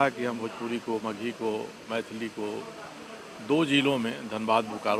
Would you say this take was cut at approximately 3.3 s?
no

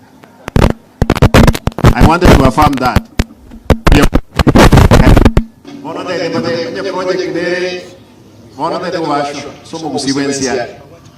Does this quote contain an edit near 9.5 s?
no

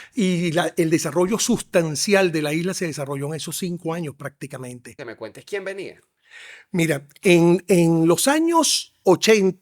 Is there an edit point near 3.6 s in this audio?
no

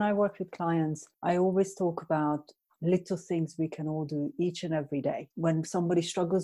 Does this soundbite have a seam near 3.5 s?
no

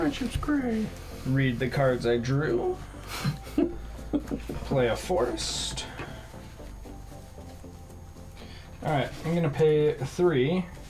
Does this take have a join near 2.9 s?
no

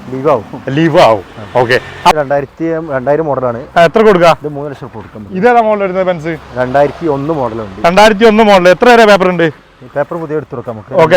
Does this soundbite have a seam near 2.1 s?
yes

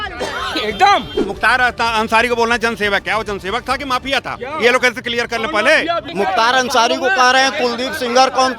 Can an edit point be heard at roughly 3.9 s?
no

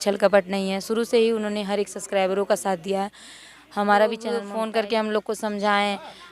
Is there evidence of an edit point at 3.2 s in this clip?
no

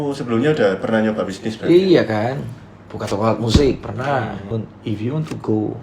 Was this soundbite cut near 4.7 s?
yes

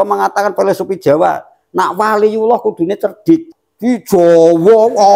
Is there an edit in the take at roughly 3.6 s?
yes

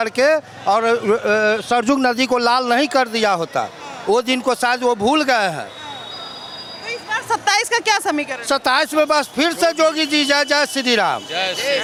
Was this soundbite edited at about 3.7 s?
no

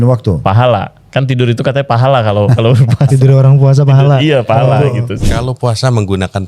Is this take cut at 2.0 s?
no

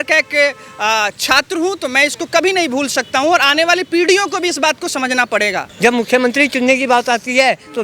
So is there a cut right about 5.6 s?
yes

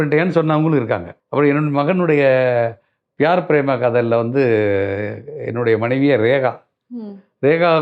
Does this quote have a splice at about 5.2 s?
no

